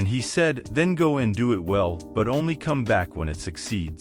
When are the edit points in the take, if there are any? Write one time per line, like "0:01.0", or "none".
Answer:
none

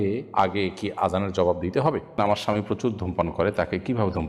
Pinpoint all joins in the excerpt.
0:02.2

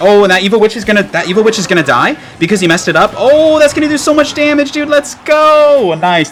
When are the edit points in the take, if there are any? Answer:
none

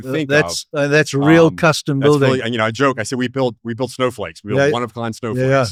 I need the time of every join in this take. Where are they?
none

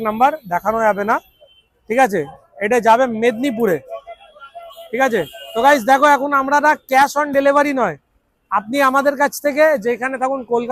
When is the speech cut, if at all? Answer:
none

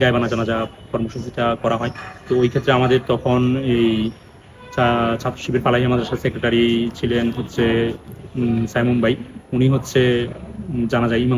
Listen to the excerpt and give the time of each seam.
none

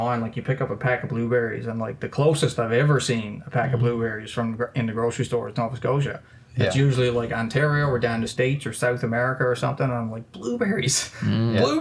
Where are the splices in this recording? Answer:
none

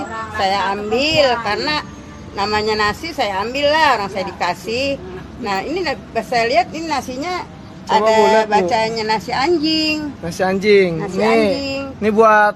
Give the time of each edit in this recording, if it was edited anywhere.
0:11.4

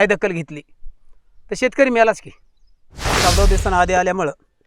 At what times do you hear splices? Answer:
0:03.0

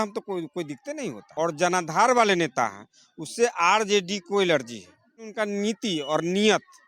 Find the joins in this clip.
0:01.2
0:05.3

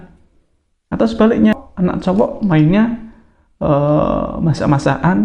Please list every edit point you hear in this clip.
0:01.6

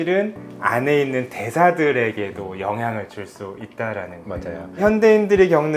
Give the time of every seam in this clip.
0:04.8

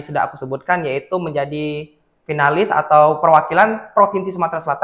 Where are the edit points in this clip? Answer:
none

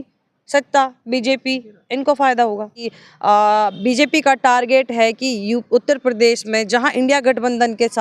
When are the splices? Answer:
0:02.8

